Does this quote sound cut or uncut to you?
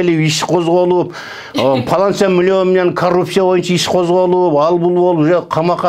uncut